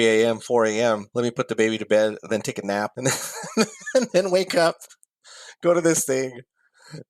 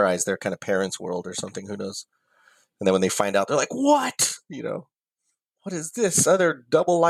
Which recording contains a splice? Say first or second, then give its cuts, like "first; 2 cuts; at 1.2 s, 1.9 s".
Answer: first; 2 cuts; at 1.1 s, 2.9 s